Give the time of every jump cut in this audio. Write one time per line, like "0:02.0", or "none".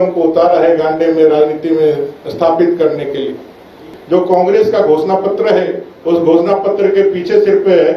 0:03.9